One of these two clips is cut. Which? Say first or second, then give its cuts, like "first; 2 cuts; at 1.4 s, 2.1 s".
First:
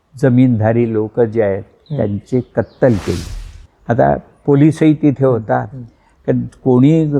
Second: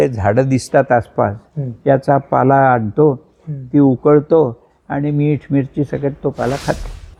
first; 2 cuts; at 1.8 s, 3.5 s